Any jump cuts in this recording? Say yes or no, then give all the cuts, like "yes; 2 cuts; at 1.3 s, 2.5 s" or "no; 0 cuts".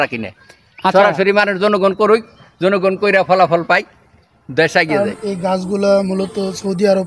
yes; 1 cut; at 5.0 s